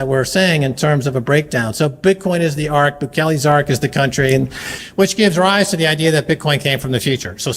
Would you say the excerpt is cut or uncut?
cut